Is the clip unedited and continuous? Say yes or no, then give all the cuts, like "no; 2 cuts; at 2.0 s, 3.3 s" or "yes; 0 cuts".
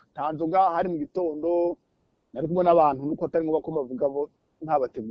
yes; 0 cuts